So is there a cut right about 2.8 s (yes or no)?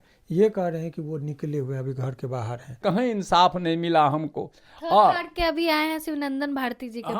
yes